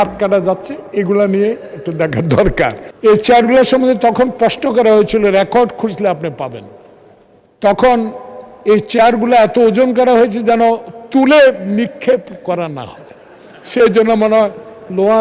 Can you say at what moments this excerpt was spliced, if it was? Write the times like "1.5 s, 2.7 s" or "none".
2.9 s